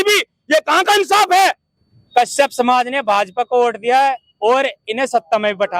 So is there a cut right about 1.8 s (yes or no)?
yes